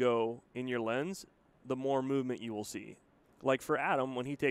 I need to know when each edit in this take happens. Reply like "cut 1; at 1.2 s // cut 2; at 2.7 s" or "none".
none